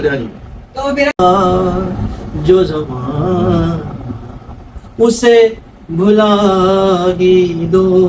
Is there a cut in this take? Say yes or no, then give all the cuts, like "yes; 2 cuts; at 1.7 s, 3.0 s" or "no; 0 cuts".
yes; 1 cut; at 1.2 s